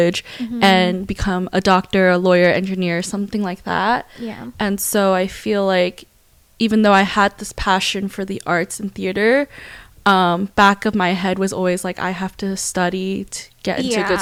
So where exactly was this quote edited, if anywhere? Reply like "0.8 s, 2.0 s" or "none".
none